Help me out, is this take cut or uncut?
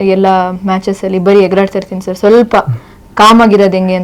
uncut